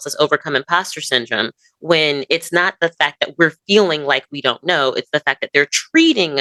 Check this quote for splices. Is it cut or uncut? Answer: uncut